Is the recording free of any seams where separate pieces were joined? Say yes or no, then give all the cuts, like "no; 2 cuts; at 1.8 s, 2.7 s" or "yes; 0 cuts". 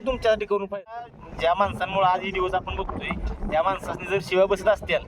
no; 1 cut; at 1.1 s